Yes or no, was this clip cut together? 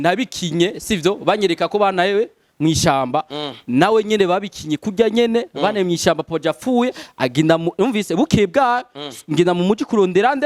no